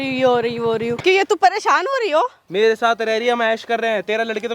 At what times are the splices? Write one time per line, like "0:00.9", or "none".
0:01.0
0:02.4